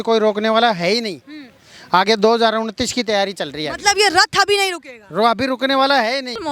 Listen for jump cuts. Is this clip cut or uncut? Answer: uncut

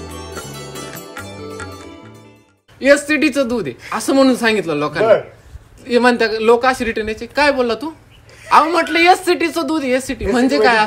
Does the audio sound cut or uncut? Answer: cut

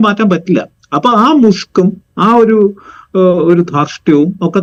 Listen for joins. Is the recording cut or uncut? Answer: uncut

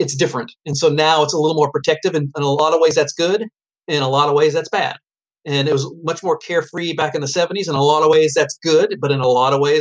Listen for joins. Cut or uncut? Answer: uncut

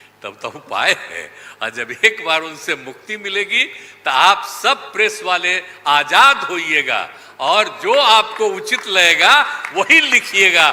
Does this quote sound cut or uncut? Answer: uncut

